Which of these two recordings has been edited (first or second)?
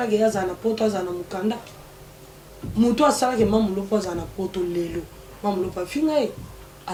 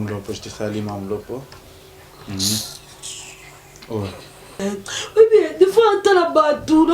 second